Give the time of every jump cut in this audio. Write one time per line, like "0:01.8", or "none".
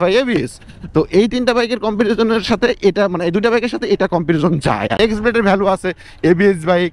0:05.0